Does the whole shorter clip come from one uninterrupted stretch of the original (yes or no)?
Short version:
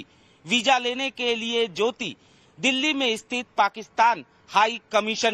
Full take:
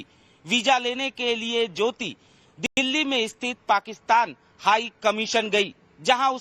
no